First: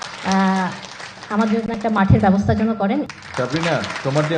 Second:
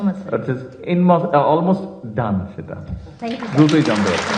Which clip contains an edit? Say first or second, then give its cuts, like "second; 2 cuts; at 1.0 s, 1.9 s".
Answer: first; 1 cut; at 3.1 s